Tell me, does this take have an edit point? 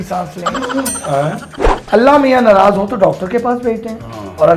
yes; 1 cut; at 1.7 s

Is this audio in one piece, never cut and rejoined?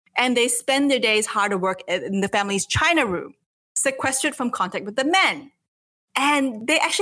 no; 1 cut; at 2.3 s

